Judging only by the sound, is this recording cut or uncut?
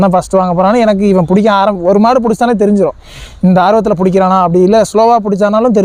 uncut